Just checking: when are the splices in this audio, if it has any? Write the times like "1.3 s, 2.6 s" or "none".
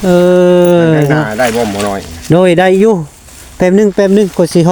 none